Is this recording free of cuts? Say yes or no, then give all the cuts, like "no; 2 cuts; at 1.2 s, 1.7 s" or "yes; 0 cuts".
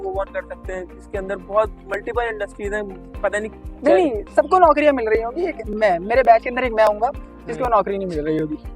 no; 1 cut; at 3.6 s